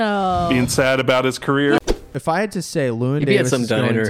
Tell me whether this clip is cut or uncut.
cut